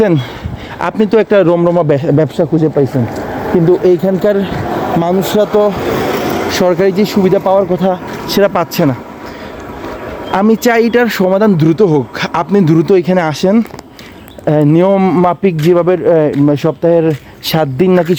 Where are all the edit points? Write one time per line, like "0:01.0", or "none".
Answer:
none